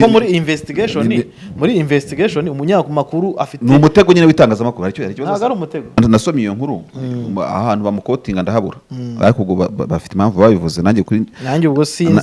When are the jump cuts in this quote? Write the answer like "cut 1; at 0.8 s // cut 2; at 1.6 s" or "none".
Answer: cut 1; at 6.0 s